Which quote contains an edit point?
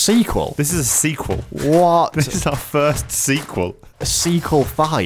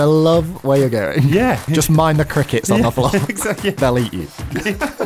second; 2 cuts; at 1.6 s, 3.8 s

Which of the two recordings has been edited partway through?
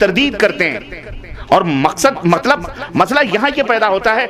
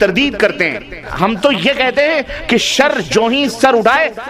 second; 1 cut; at 1.1 s

